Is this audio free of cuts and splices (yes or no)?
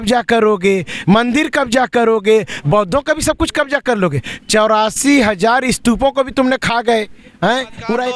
yes